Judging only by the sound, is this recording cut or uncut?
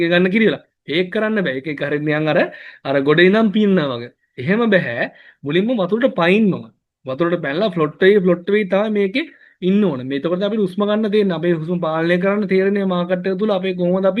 uncut